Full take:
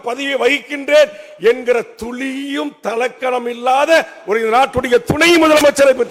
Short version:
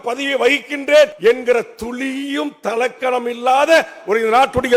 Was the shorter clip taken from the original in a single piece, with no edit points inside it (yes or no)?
no